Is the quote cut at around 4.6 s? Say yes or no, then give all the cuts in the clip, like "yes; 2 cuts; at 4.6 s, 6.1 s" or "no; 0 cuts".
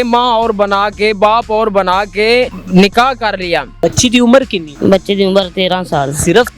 yes; 3 cuts; at 2.6 s, 3.7 s, 4.6 s